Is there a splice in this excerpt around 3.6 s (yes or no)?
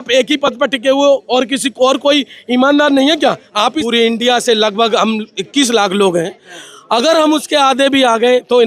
yes